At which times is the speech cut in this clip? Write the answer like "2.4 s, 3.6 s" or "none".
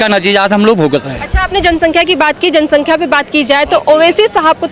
none

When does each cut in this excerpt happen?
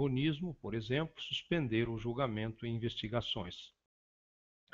1.7 s

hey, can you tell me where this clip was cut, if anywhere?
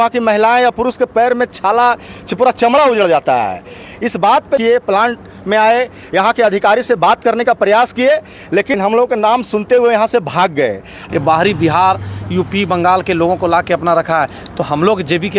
4.6 s, 8.8 s, 11.0 s

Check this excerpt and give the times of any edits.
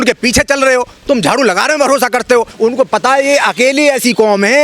2.5 s

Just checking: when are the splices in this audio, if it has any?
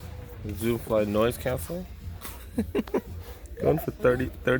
none

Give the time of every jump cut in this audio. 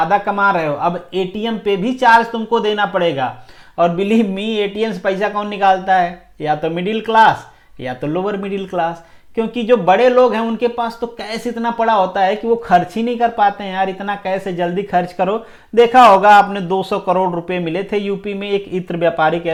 none

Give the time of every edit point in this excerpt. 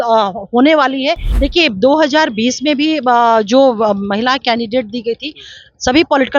1.3 s

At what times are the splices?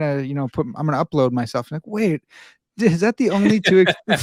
none

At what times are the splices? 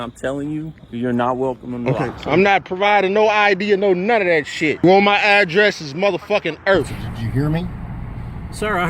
2.2 s, 4.8 s, 7.0 s

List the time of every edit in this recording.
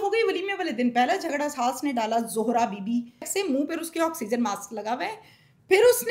3.3 s

